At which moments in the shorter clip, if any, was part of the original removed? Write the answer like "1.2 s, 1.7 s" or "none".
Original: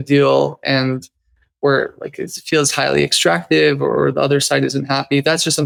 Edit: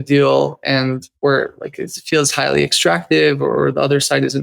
1.1 s

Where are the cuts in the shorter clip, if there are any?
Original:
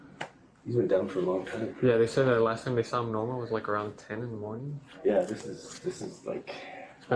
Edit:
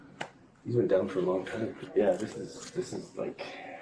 1.7 s

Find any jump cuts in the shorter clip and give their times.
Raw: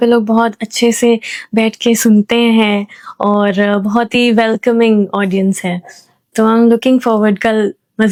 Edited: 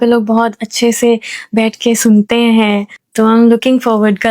3.0 s

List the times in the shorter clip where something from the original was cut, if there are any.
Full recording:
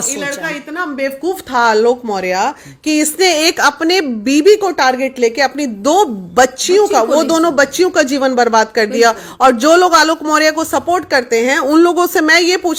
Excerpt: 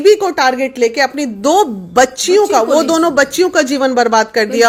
none

